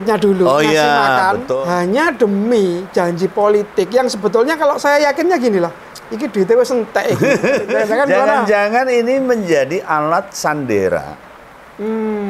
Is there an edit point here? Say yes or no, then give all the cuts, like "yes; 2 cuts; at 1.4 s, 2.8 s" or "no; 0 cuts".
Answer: yes; 2 cuts; at 1.5 s, 7.7 s